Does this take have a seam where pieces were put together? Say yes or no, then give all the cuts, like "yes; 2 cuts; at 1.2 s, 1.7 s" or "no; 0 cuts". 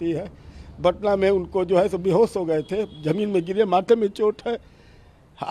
no; 0 cuts